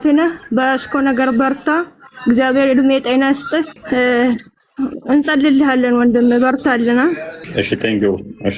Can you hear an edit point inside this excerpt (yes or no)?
yes